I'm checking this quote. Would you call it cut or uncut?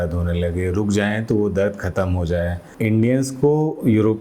cut